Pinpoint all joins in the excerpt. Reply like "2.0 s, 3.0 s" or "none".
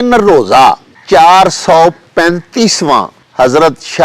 0.9 s, 3.2 s

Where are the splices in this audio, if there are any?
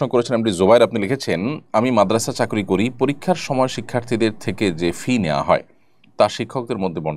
none

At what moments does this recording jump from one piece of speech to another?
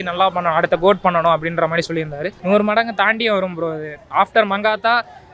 2.3 s, 4.0 s

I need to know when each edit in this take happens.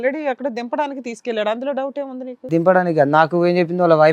none

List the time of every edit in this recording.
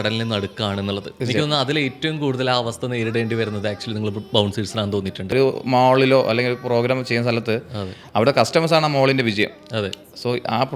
1.1 s, 5.3 s

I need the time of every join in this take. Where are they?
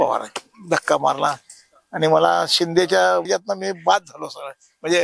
3.3 s

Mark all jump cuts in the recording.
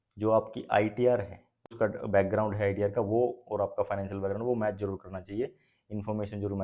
1.7 s

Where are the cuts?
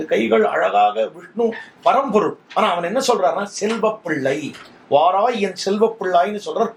none

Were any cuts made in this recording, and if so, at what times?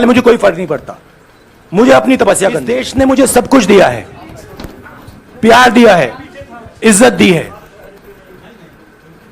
2.8 s

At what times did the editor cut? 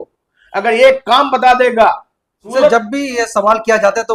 none

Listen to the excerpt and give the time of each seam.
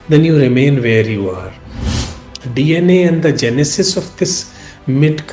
1.9 s

